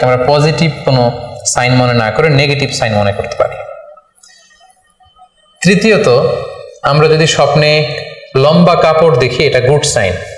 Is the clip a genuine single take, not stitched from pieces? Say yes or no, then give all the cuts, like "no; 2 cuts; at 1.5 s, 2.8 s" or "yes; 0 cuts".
yes; 0 cuts